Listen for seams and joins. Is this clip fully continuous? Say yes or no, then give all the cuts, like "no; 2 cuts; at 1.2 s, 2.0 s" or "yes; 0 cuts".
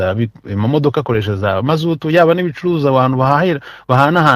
yes; 0 cuts